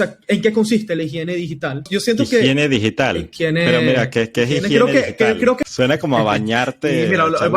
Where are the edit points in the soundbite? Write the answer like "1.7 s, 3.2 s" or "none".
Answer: 1.9 s, 3.3 s, 5.6 s